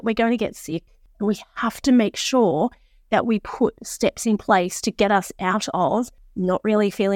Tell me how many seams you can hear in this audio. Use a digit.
2